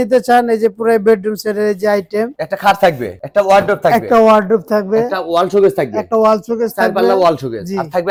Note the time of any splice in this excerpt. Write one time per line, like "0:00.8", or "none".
none